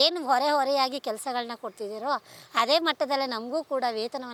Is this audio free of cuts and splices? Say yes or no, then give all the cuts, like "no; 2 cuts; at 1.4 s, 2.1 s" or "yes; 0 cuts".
yes; 0 cuts